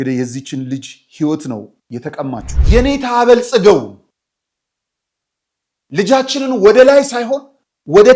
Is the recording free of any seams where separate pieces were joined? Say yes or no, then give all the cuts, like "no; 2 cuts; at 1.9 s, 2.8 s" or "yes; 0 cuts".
no; 1 cut; at 2.5 s